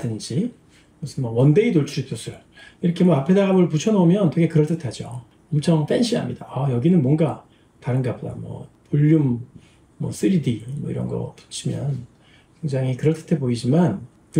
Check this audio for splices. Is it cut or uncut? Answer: uncut